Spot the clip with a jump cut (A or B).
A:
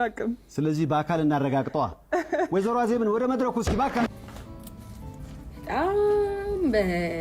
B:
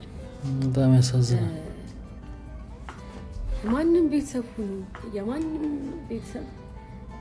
A